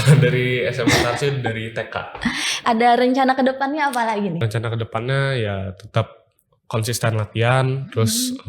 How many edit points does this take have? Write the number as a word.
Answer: two